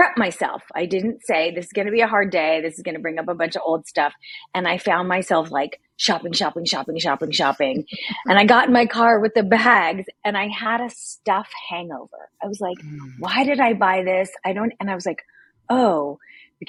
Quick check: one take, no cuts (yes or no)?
yes